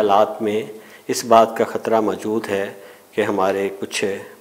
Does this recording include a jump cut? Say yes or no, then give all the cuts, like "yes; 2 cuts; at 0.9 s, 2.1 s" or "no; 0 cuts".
no; 0 cuts